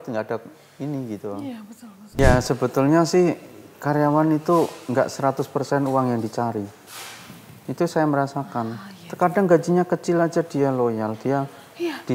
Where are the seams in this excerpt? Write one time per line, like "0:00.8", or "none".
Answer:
0:02.2